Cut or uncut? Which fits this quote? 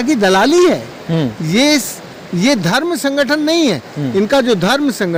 uncut